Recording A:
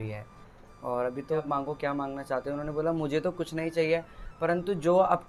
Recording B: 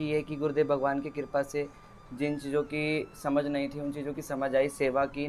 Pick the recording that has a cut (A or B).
A